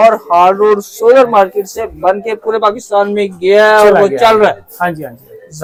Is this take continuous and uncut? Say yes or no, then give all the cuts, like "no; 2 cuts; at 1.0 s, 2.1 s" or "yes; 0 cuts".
yes; 0 cuts